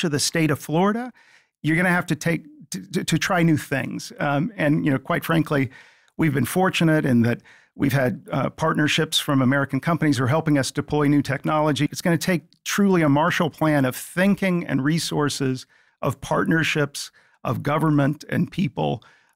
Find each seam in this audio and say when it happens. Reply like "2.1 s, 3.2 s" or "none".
11.9 s